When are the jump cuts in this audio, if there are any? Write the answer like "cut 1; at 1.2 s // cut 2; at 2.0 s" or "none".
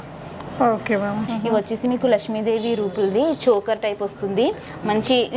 cut 1; at 1.3 s